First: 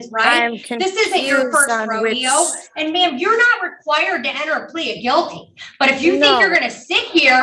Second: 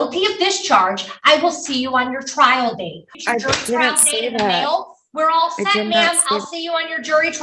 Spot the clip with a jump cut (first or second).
second